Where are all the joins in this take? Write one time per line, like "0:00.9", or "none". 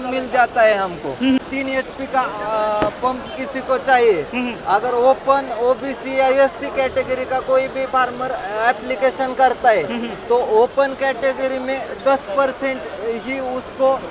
0:01.4